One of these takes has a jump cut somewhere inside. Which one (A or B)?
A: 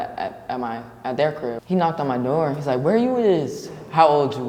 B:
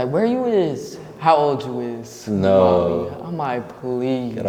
A